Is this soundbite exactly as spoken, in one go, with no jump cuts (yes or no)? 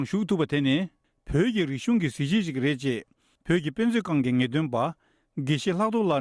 yes